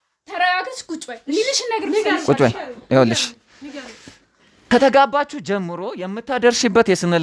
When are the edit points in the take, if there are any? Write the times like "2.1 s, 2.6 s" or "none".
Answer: 4.7 s